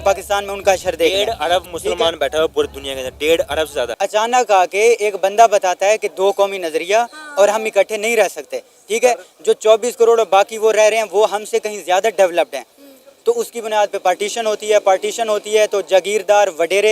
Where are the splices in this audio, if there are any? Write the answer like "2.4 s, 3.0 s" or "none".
3.9 s